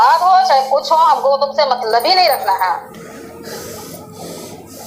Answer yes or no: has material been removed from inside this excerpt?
no